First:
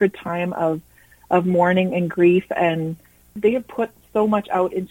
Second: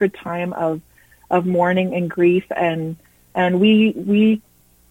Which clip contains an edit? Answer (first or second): first